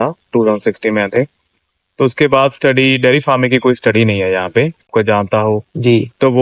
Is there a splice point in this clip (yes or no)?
yes